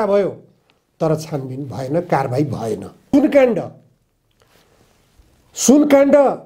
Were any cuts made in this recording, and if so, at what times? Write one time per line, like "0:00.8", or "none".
0:03.1